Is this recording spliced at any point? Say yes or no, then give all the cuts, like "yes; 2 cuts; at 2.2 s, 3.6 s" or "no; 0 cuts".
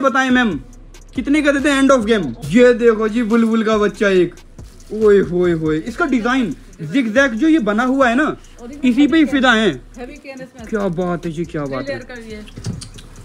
yes; 1 cut; at 2.4 s